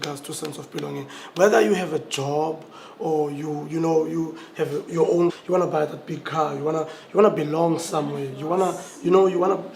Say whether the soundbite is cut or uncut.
uncut